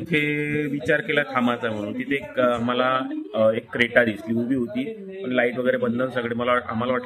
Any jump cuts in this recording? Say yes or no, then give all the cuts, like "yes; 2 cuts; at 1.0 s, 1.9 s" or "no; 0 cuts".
no; 0 cuts